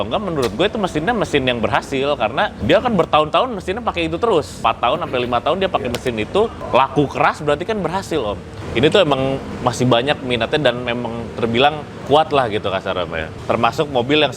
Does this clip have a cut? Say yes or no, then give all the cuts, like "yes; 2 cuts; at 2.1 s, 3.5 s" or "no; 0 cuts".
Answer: yes; 7 cuts; at 2.6 s, 4.6 s, 6.6 s, 8.5 s, 9.5 s, 11.9 s, 13.2 s